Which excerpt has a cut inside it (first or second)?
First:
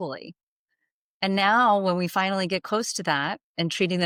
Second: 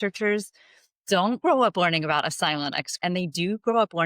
second